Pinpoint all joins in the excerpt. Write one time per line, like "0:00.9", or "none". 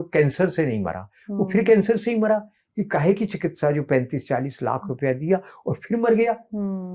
none